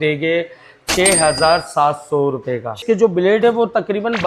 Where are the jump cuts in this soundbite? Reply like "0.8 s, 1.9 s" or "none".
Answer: 2.8 s